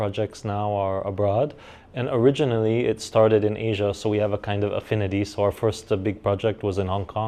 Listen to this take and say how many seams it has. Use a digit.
0